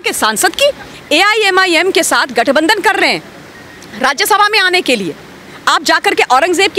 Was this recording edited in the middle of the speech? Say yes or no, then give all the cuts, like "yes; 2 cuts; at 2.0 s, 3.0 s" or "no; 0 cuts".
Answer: yes; 1 cut; at 0.9 s